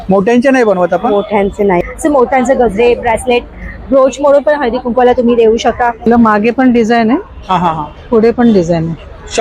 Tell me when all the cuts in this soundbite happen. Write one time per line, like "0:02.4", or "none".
0:01.8
0:06.1